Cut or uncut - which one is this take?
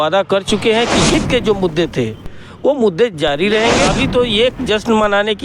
cut